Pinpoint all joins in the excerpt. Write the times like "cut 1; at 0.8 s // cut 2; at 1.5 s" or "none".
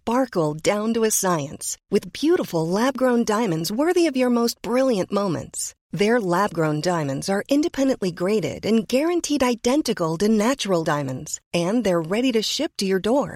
none